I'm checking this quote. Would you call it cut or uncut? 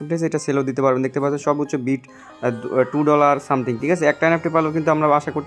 uncut